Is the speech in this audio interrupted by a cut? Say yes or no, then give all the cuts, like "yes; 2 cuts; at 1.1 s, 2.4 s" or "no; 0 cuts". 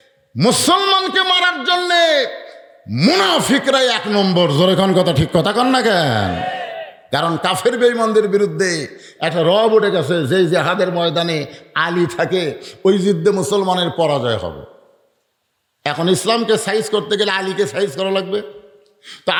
no; 0 cuts